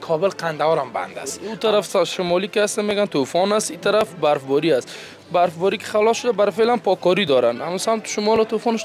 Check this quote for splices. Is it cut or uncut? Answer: cut